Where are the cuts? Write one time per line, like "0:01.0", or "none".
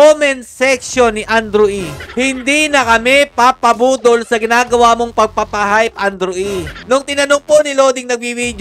0:06.8